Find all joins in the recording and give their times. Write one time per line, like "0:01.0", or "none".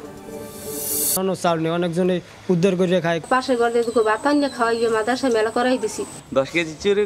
0:01.2